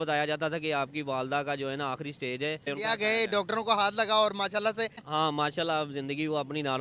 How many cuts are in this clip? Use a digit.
2